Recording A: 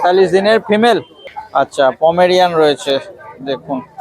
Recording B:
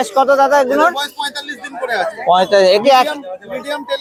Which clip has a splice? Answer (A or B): A